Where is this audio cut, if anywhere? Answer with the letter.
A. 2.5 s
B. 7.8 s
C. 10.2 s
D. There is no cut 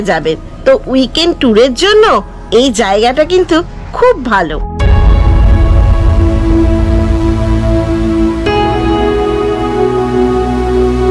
D